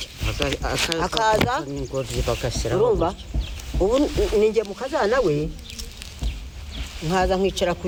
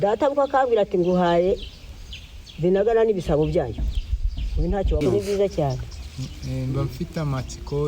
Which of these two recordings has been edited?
second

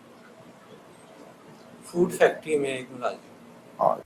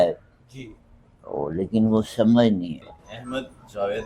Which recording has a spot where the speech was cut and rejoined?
second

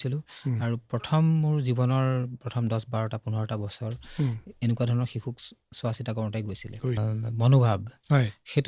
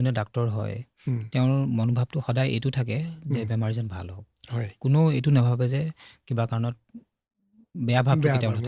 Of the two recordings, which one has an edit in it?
first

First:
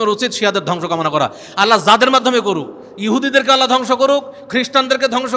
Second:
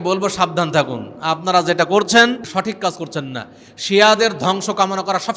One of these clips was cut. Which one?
second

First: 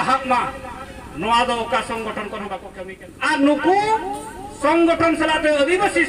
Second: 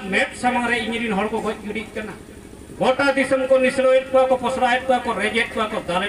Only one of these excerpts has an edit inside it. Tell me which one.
first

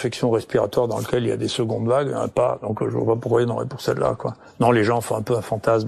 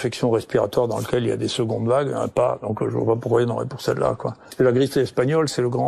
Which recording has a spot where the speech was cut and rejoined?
second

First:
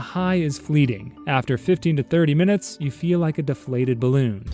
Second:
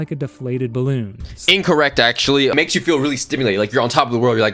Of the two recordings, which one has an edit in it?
second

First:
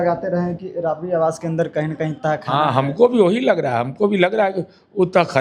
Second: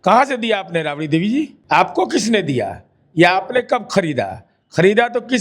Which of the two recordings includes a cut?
second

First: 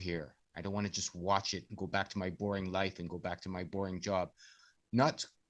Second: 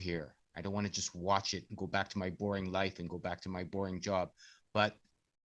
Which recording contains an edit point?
first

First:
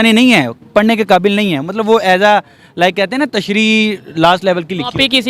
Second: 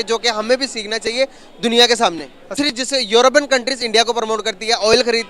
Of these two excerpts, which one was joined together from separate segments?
second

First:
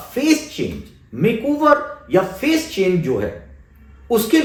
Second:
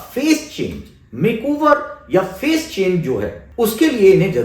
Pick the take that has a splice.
second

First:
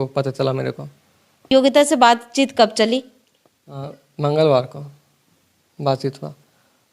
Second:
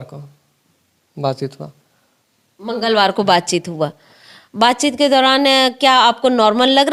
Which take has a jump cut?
first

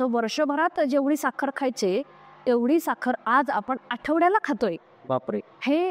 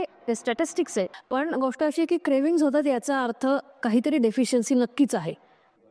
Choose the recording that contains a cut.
second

